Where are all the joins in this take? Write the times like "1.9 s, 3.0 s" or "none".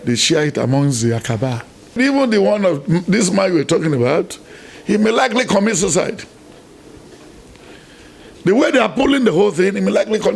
1.9 s